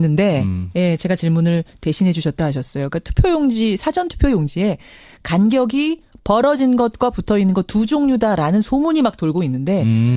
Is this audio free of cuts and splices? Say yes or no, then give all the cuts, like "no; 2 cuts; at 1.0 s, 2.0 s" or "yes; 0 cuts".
yes; 0 cuts